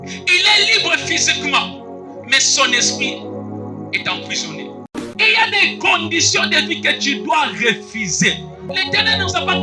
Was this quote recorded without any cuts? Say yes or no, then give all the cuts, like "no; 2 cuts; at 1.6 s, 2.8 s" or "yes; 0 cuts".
no; 2 cuts; at 4.9 s, 8.6 s